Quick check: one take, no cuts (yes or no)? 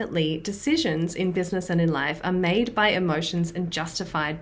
yes